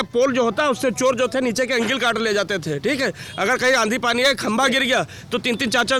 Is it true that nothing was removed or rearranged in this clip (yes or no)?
yes